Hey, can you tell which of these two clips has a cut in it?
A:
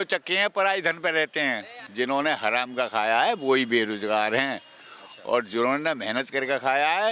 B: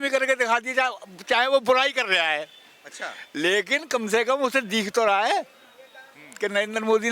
A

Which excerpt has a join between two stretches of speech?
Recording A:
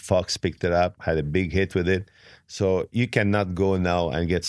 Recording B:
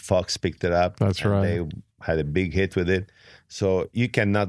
A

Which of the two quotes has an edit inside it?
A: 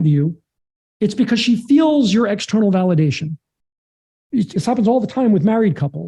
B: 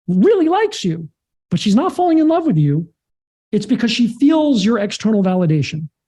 A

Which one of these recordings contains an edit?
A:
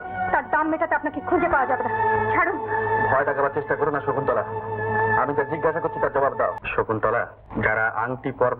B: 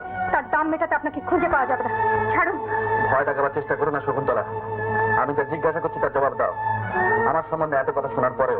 A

